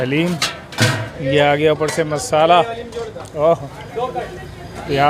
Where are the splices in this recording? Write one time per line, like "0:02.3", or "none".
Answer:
0:01.1